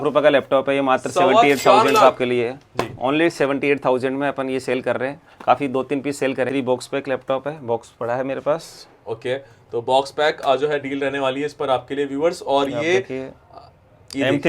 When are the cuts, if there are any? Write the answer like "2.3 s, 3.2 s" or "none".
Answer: 6.5 s